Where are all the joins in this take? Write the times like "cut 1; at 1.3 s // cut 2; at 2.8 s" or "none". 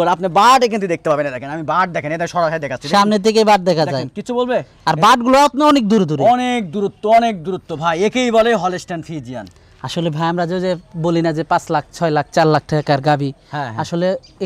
none